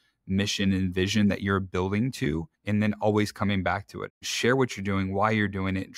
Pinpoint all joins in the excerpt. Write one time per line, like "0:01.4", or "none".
0:02.5
0:04.2